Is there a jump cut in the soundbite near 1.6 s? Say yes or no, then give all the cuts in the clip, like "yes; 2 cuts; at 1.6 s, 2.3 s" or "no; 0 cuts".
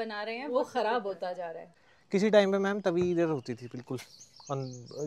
yes; 1 cut; at 1.6 s